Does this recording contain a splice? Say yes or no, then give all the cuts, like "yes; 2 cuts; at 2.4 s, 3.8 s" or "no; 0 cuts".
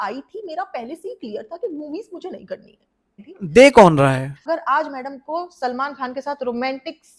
yes; 1 cut; at 4.4 s